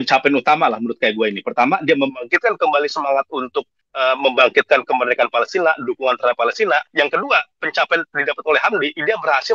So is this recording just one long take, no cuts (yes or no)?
yes